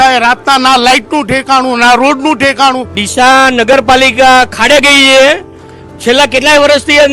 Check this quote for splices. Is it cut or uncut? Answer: cut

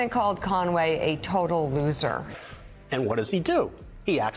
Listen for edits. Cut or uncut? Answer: cut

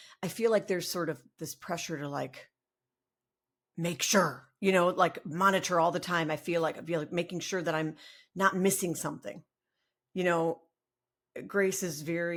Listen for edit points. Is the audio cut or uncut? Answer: uncut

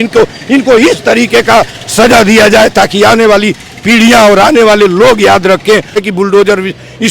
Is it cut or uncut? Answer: cut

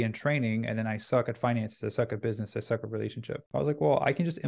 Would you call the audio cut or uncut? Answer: cut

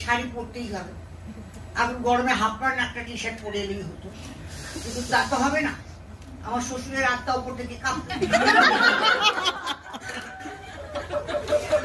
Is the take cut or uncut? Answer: uncut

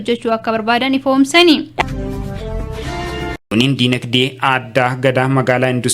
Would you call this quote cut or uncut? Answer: cut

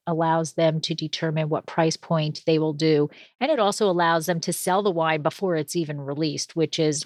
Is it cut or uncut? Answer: uncut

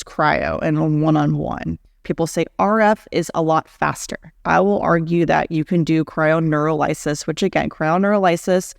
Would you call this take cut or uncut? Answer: cut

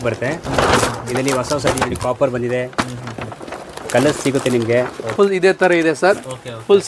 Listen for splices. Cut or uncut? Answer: uncut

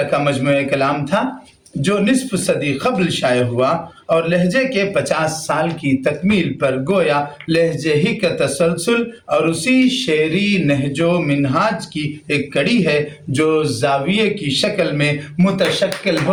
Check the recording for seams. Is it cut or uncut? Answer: uncut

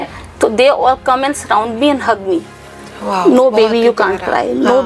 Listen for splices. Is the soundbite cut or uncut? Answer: uncut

